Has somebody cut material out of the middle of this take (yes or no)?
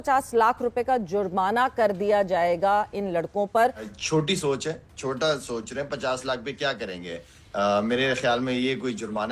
yes